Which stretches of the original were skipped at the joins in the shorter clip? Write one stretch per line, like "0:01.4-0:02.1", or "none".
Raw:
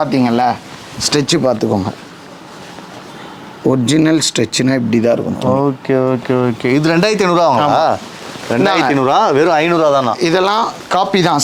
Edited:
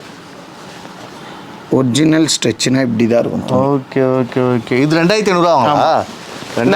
none